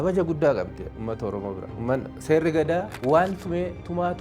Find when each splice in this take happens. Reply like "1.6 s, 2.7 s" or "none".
1.7 s, 2.9 s